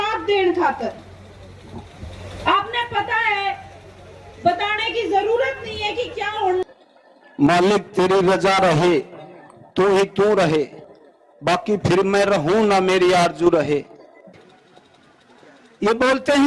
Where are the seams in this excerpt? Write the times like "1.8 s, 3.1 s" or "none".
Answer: 6.6 s, 14.4 s